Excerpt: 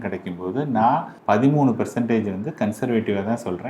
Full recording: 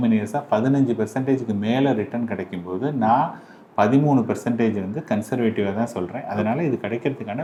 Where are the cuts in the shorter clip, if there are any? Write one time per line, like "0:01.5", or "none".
0:01.1

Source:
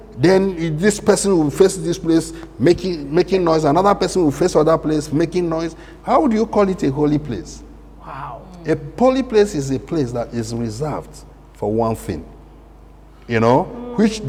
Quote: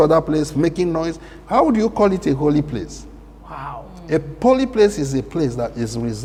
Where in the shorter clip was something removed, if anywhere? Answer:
none

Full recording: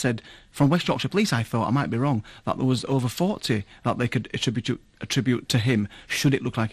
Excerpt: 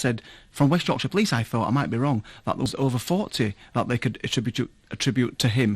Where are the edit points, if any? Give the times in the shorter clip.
0:02.7

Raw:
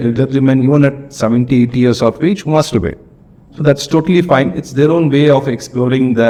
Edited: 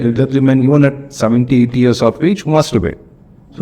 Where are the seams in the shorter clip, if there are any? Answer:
none

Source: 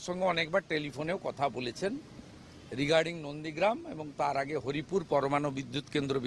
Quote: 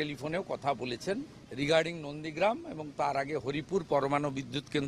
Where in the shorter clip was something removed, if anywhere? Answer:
0:01.4

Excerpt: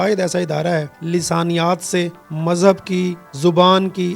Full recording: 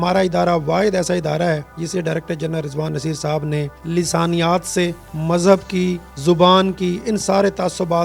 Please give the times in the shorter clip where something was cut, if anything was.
0:01.0

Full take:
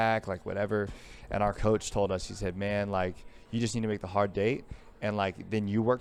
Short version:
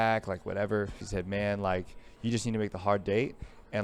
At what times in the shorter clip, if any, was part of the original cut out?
0:01.0

